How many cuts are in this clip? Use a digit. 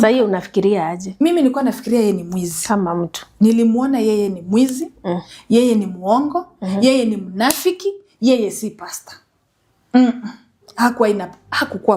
0